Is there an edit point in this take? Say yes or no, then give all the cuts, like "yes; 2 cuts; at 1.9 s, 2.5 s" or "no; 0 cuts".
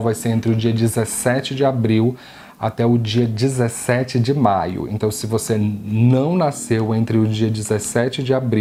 no; 0 cuts